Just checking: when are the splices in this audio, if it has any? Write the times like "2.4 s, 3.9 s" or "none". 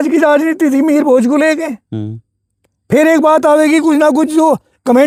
none

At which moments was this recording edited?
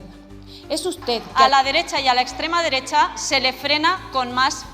1.2 s

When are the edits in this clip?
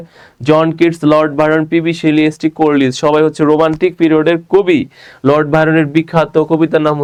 none

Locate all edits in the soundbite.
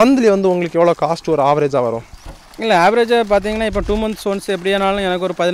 none

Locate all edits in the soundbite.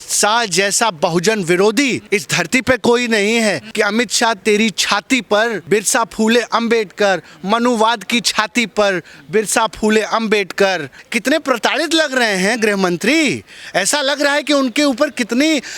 2.0 s, 3.6 s, 5.6 s, 10.9 s

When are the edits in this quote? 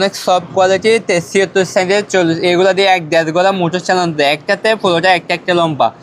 none

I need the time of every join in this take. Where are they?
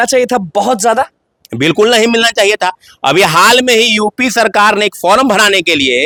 none

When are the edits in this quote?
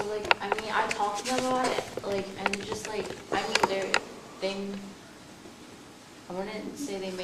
none

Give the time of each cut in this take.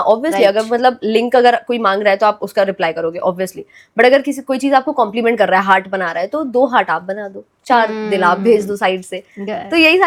none

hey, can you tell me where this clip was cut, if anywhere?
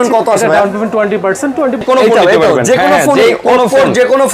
1.8 s

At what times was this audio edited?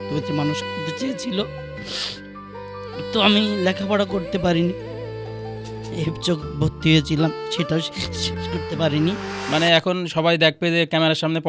9.3 s

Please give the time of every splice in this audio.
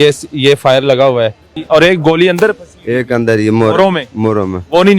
1.5 s

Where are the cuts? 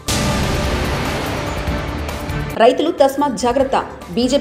2.4 s

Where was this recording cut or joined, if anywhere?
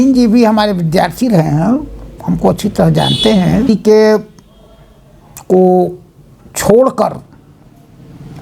3.7 s

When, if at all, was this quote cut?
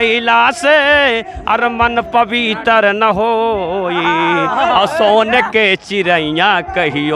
none

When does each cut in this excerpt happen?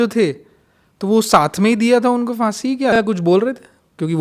3.0 s

